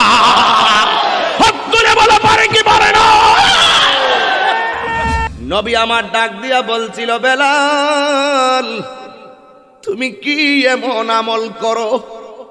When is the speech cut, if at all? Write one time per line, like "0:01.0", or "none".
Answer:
0:05.3